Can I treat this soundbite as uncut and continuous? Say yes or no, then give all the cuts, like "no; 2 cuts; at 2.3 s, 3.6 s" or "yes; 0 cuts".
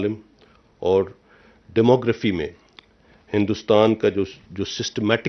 yes; 0 cuts